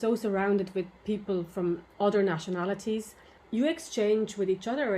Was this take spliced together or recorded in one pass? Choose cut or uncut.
cut